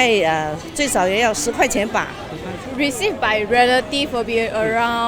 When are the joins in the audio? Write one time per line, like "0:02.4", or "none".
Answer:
0:02.6